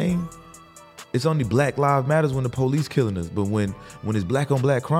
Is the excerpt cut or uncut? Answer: uncut